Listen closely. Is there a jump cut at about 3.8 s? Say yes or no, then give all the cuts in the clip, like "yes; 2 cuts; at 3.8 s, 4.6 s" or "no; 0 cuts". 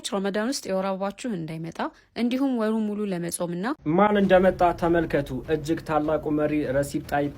yes; 1 cut; at 3.8 s